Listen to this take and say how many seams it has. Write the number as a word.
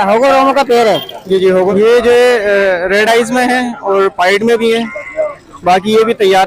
one